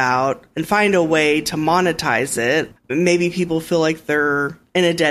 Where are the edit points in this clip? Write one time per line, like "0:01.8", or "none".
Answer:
0:02.7